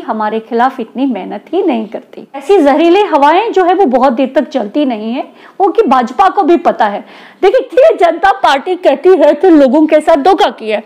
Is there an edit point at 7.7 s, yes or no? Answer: yes